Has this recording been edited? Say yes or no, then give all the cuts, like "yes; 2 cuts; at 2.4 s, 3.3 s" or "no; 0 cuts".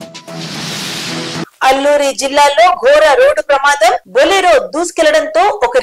yes; 1 cut; at 1.4 s